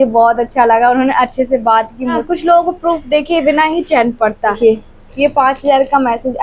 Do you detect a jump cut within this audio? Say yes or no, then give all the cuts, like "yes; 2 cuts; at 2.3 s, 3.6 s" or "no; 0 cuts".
yes; 2 cuts; at 2.2 s, 4.6 s